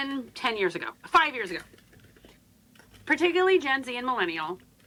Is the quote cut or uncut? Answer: uncut